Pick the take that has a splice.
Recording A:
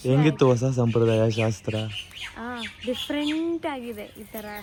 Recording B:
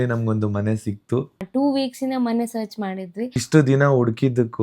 B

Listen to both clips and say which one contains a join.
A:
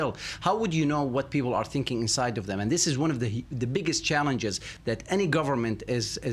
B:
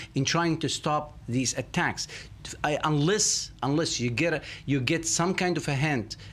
A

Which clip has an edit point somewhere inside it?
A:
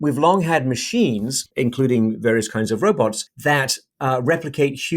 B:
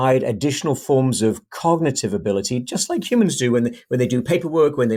A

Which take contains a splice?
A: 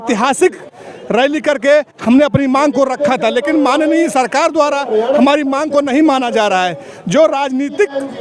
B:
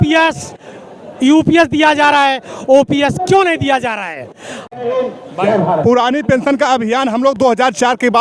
B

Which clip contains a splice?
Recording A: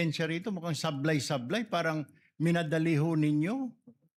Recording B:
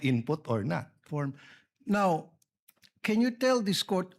B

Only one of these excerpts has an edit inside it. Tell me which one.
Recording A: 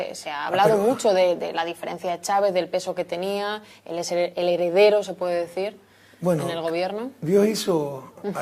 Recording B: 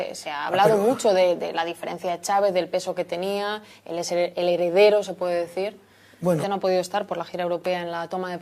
A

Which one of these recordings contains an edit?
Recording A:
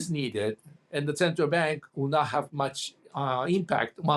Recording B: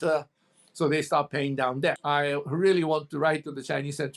B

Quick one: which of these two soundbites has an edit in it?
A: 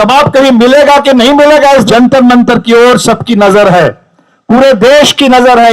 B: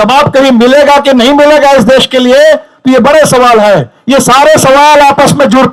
A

